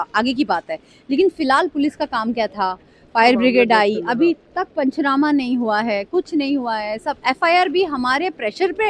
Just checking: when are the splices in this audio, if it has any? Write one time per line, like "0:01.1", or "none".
none